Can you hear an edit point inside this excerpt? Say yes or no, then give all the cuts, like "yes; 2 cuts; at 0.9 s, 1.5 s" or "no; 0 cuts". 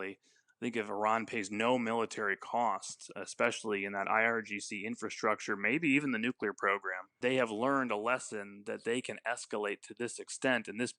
no; 0 cuts